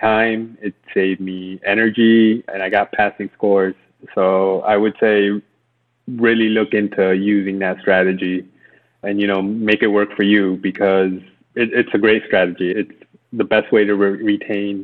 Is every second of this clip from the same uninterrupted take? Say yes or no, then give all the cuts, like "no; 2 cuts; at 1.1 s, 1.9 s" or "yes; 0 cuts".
no; 1 cut; at 12.7 s